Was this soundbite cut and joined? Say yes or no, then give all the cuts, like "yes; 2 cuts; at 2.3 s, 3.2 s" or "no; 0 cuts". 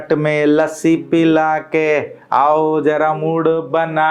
no; 0 cuts